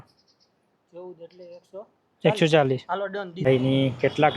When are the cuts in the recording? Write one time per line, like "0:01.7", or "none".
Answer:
0:03.4